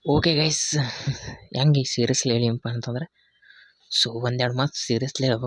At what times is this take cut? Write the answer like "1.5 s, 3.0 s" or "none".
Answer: none